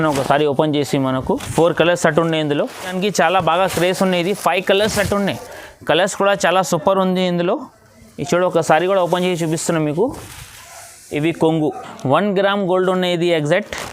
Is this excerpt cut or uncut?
cut